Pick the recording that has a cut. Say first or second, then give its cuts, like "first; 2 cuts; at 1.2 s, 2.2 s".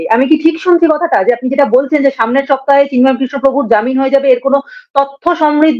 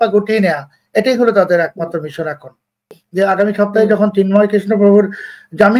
second; 1 cut; at 2.9 s